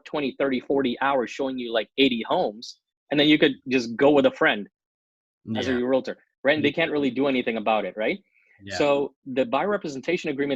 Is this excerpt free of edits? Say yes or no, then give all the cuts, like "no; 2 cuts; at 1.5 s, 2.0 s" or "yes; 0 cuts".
yes; 0 cuts